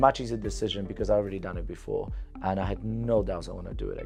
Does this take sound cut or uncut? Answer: uncut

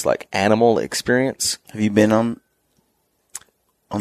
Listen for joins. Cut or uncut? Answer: uncut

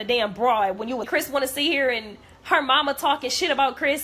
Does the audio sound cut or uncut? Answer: cut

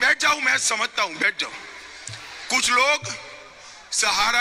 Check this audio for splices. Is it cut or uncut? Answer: uncut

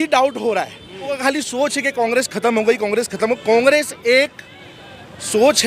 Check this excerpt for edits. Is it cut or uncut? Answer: cut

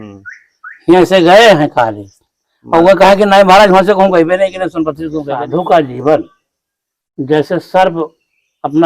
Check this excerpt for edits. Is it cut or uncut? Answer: cut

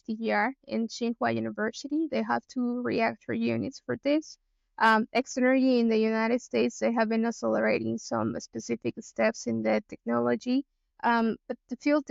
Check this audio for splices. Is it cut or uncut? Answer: uncut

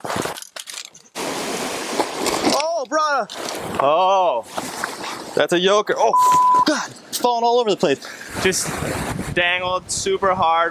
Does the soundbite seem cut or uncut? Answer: uncut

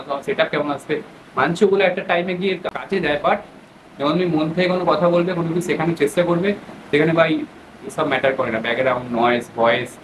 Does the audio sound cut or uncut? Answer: cut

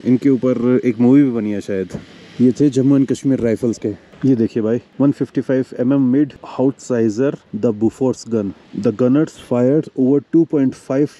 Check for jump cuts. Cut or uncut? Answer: uncut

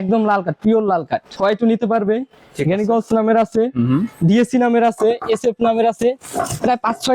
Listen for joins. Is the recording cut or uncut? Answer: cut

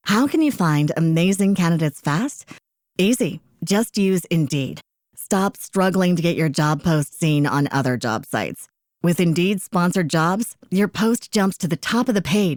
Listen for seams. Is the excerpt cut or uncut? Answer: uncut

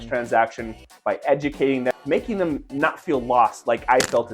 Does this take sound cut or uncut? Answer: cut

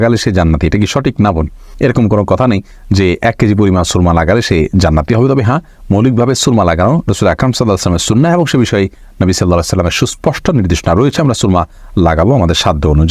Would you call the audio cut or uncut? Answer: uncut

